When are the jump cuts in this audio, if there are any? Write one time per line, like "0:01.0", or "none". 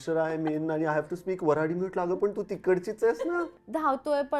0:03.4